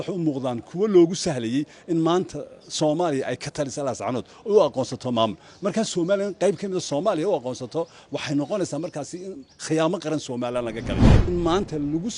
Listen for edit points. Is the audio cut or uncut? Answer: cut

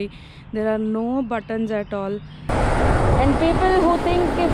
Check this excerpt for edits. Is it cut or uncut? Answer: cut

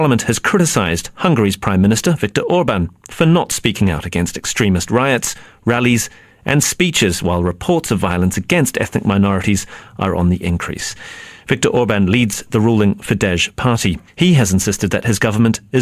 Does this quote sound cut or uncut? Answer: cut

